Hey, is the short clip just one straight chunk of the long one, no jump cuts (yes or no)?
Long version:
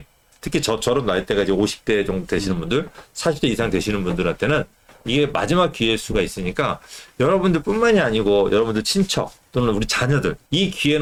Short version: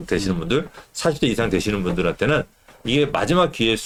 yes